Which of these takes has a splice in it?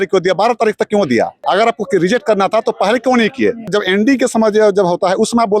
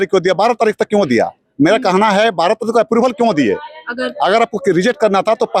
first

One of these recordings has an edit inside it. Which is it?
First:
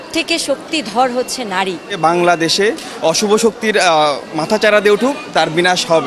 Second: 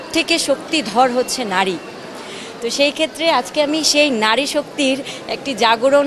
first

